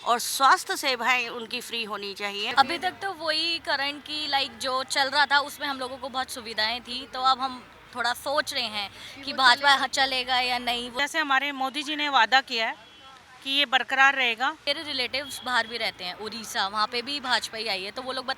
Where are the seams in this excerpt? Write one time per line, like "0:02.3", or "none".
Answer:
0:02.5
0:10.9
0:14.6